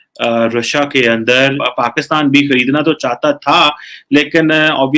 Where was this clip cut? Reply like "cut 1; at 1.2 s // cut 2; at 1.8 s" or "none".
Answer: cut 1; at 1.6 s